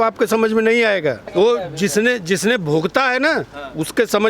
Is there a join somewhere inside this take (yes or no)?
yes